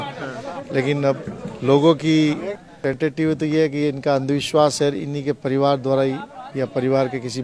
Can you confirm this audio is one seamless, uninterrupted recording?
no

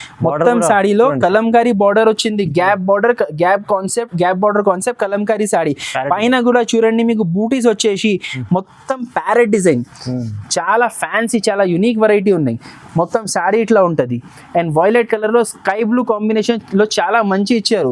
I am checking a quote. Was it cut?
no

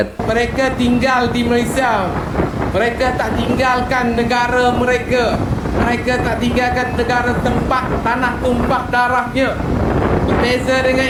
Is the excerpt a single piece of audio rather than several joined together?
yes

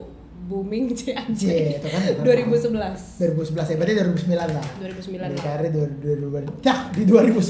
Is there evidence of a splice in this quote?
no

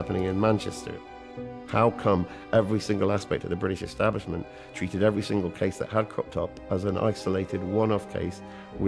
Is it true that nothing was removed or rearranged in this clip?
no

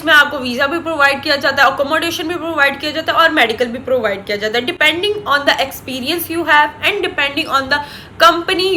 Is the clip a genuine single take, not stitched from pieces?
yes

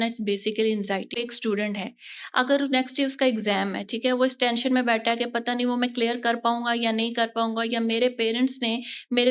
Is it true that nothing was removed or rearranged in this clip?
no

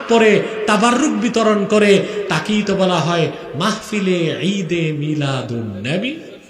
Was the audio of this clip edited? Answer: no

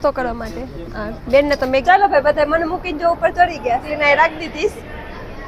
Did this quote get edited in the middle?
yes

